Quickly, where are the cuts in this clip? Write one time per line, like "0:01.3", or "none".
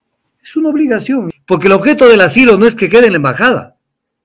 0:01.3

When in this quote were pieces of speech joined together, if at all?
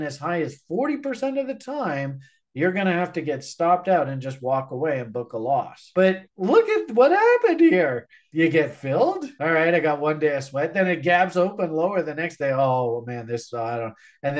0:05.9

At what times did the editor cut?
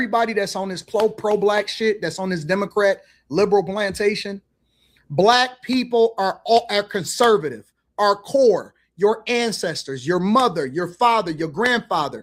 none

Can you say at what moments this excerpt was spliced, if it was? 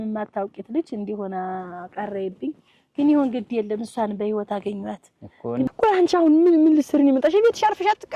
0:05.7

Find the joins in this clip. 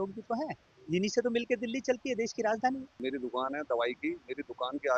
0:03.0

